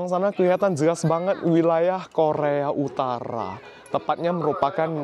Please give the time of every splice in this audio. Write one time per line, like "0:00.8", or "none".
none